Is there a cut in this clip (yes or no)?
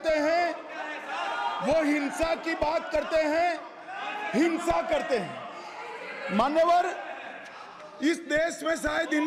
no